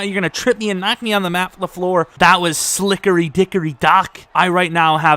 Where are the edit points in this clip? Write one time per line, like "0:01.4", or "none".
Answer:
0:02.1
0:04.2